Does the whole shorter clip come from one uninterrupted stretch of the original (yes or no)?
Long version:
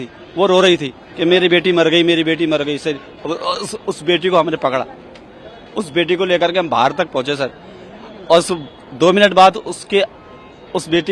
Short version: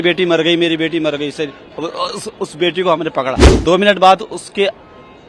no